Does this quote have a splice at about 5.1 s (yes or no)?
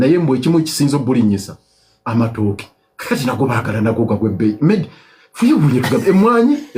no